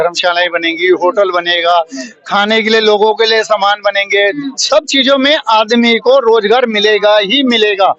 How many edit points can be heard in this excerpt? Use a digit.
0